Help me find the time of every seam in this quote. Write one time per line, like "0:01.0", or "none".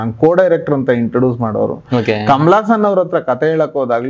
none